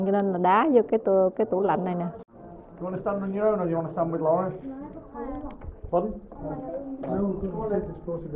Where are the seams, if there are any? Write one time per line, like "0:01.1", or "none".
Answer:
0:02.2

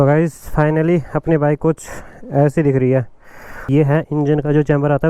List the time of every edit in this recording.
0:03.7

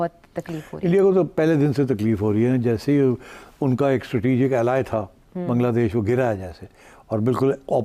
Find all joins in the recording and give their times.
none

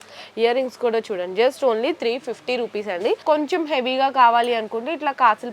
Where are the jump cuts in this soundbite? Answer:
0:03.2

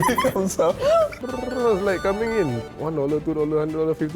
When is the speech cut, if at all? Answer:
0:01.2

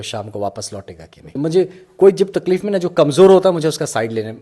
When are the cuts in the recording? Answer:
0:01.3

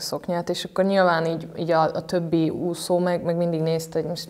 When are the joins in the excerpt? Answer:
none

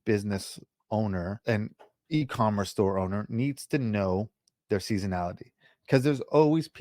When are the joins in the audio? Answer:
0:01.4

